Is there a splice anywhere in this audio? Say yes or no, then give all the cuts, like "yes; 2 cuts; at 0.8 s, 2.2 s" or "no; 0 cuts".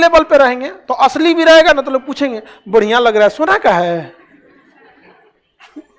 no; 0 cuts